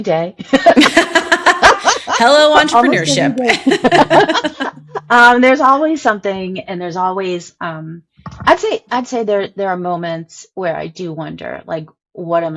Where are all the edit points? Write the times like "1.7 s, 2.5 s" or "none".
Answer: none